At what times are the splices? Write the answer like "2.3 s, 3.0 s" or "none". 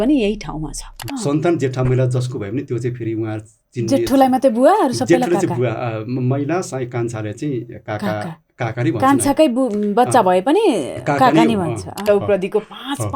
1.1 s, 12.1 s

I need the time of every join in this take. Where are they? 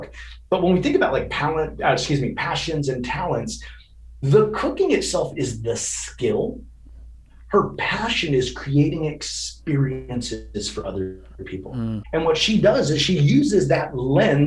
12.0 s

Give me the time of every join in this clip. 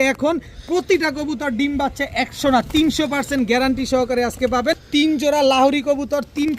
4.8 s

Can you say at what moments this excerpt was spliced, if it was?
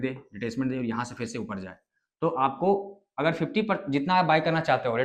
none

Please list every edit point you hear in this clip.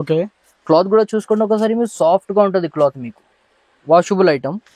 none

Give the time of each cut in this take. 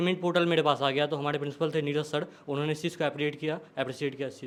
none

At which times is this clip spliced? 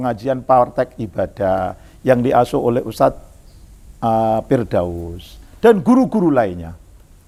none

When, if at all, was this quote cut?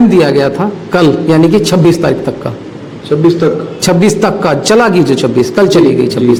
none

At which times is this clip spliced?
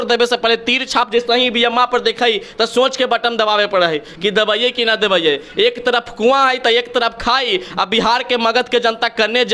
none

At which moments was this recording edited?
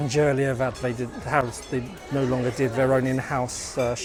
none

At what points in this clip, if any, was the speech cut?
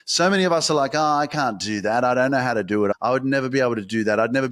2.9 s

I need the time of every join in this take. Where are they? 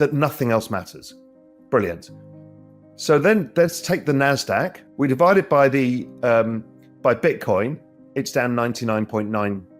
4.8 s

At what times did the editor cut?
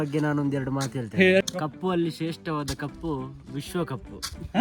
1.4 s

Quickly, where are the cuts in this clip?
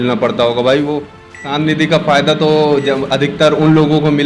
1.2 s

